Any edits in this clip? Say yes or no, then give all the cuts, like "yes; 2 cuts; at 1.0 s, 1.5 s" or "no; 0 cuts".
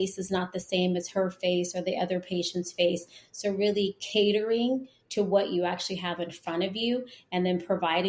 no; 0 cuts